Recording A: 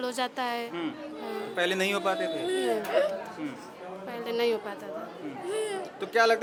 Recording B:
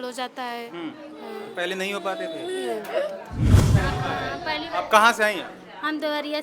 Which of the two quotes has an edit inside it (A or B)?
B